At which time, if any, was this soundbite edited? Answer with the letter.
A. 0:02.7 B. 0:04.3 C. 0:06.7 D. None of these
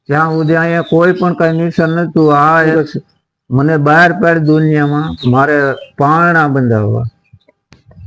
A